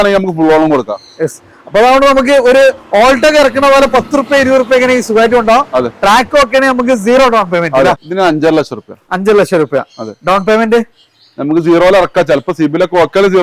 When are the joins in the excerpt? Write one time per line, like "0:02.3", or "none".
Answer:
0:08.1

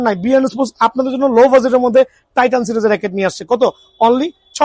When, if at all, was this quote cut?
none

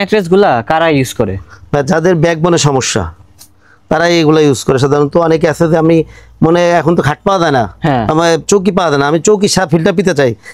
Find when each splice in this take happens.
none

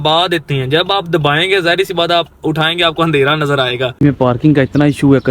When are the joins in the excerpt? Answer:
0:03.9

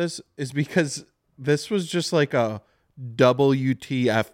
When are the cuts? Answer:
none

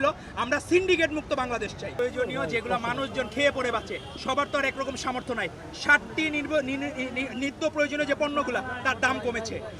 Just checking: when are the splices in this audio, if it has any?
0:01.9

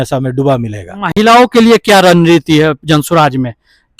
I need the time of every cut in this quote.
none

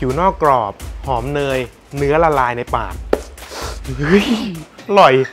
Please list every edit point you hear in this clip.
none

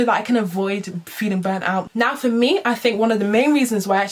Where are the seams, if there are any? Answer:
0:01.9

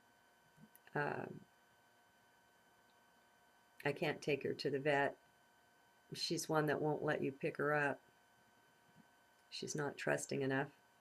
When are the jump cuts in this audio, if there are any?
none

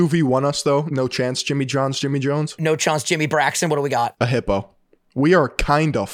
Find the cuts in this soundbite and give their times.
0:00.9
0:02.6
0:04.1

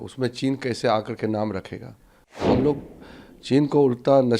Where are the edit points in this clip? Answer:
0:02.4

